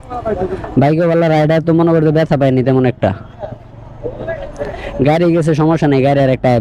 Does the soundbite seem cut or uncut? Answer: uncut